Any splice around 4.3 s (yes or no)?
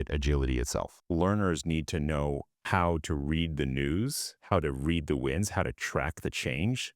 no